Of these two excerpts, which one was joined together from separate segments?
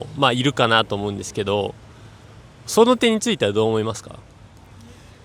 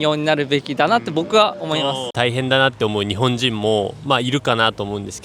second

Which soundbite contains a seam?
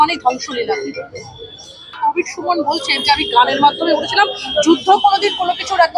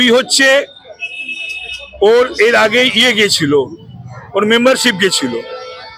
first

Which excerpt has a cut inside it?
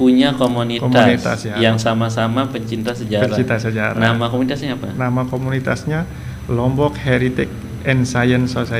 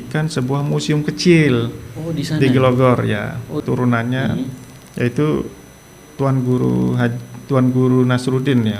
second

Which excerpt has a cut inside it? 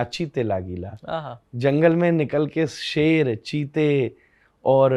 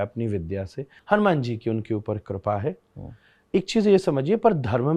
second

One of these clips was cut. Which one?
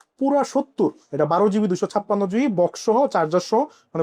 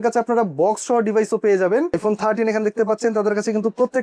second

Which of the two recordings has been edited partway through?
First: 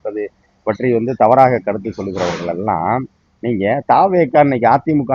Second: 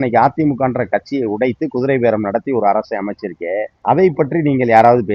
second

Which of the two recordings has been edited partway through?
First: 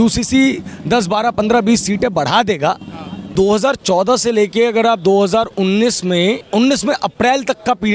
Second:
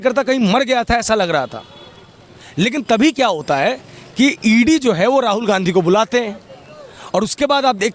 first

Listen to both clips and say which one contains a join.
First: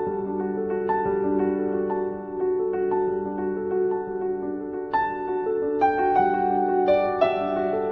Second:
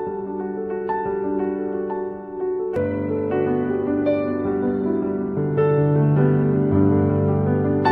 second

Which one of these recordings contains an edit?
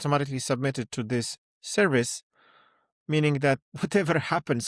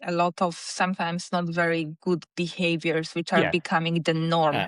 first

